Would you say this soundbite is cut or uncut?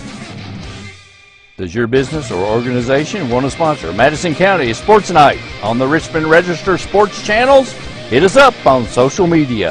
uncut